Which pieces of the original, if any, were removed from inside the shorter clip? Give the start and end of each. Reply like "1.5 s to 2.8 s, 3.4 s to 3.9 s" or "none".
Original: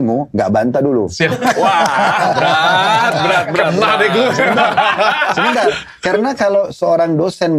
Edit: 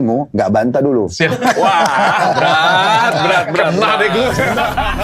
none